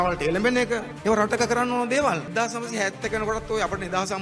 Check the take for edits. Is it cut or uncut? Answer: cut